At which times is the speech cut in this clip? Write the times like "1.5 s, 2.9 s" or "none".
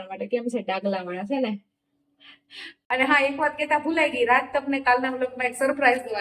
2.7 s